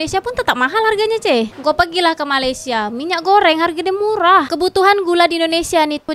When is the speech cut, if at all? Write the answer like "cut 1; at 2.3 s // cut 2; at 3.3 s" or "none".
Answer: cut 1; at 4.5 s